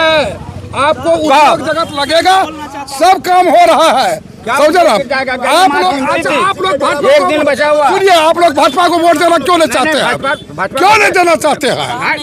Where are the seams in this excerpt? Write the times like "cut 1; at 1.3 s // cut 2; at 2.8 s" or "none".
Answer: none

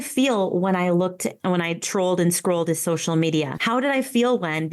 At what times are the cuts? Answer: cut 1; at 3.5 s

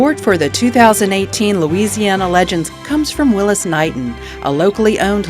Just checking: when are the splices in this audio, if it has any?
cut 1; at 2.8 s

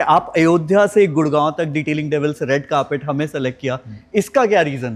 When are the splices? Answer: none

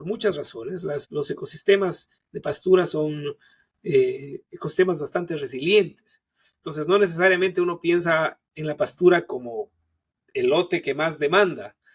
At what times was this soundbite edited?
cut 1; at 1.1 s

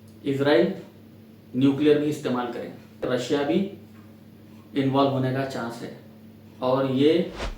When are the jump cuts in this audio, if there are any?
cut 1; at 3.1 s

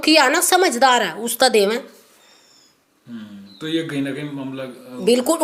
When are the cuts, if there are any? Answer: none

